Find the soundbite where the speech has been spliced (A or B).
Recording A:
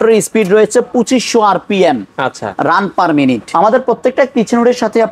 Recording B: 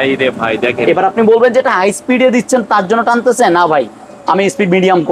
A